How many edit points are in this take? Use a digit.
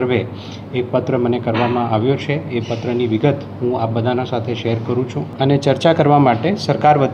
1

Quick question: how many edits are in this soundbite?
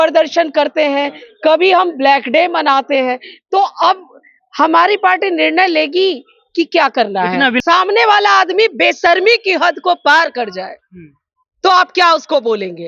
1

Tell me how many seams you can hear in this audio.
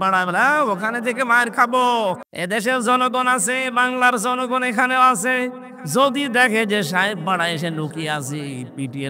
1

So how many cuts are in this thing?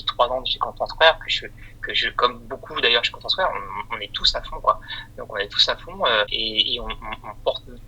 1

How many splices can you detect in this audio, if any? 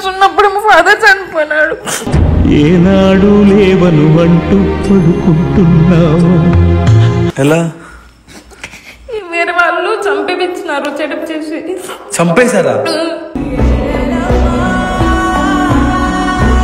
0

